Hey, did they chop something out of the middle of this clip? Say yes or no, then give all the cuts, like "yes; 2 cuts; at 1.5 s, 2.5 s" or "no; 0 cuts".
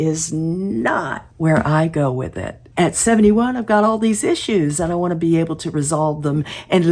yes; 2 cuts; at 1.2 s, 2.6 s